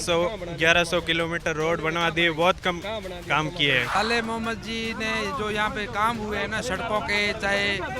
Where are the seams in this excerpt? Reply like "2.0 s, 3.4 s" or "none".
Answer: 4.0 s

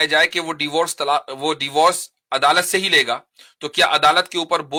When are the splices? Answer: none

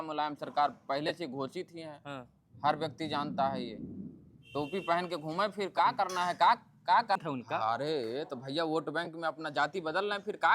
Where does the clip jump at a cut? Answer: 7.2 s

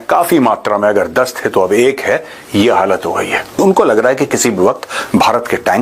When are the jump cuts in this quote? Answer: 3.5 s

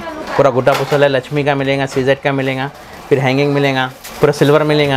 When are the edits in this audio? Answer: 4.0 s

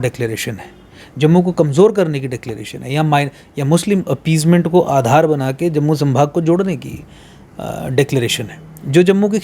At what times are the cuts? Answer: none

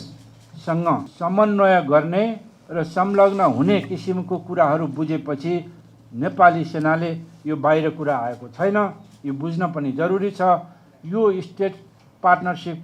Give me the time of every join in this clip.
1.1 s

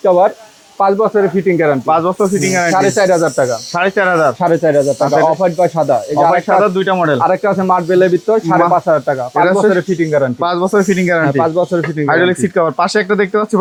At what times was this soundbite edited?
none

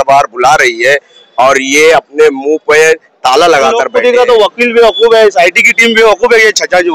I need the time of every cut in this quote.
3.9 s

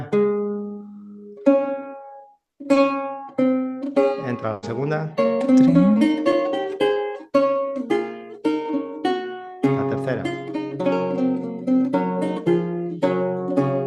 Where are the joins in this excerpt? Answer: none

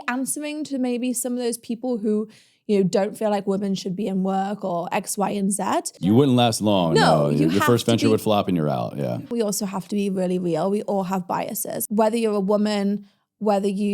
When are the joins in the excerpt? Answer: 6.0 s, 9.1 s, 11.7 s

